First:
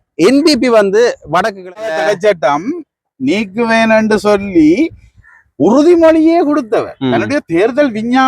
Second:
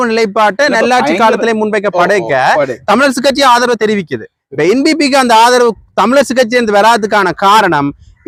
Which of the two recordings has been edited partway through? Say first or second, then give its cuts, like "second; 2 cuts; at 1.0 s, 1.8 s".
first; 1 cut; at 1.9 s